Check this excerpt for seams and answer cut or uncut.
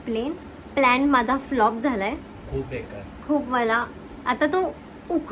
uncut